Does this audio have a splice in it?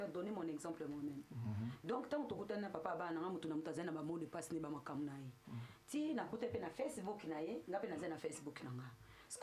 no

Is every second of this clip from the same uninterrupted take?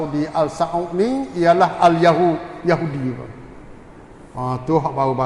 yes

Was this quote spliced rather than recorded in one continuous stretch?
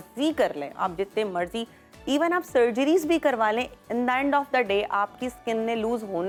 no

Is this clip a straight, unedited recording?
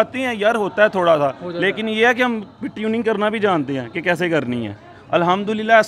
yes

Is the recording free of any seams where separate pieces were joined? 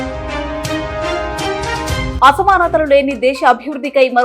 no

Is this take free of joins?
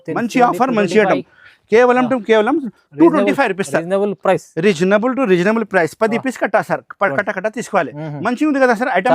yes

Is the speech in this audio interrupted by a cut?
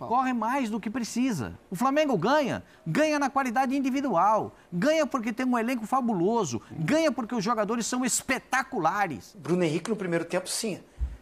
yes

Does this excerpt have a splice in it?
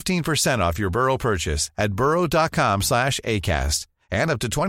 no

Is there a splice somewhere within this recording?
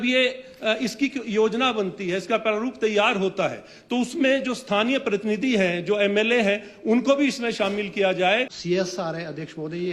yes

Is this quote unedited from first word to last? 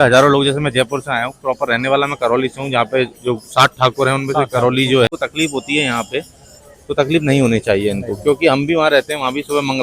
no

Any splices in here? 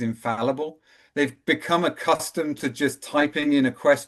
no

